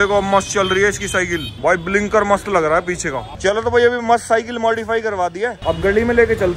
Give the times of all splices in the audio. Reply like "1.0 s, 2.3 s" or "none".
none